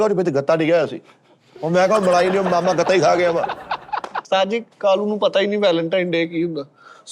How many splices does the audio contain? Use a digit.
1